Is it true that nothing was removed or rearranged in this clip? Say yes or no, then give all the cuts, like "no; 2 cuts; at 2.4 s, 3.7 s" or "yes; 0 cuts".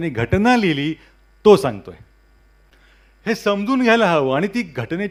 yes; 0 cuts